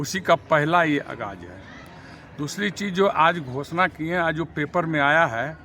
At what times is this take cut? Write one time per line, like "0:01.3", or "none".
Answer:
none